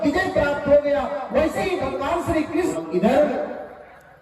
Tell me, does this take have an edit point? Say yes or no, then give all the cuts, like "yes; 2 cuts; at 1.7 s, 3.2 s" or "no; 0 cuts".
yes; 1 cut; at 2.7 s